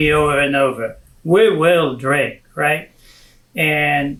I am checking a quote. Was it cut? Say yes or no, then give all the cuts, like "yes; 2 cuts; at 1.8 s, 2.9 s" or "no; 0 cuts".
no; 0 cuts